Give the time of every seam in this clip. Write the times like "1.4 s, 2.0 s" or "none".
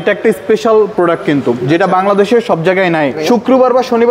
3.2 s